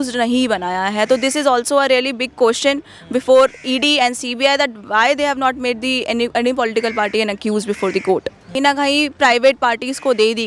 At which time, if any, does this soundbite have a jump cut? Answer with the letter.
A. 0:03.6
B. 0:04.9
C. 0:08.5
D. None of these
C